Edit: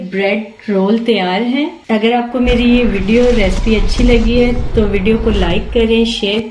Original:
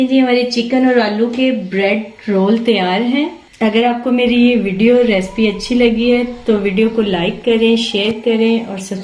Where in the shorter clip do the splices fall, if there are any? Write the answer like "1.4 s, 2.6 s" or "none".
1.8 s